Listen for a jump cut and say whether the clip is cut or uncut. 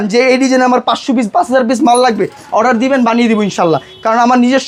uncut